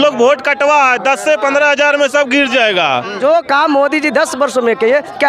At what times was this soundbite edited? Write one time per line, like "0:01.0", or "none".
0:03.1